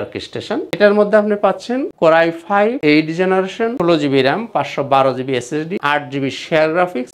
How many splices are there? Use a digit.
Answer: 0